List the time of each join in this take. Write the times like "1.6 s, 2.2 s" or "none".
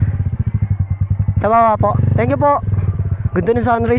none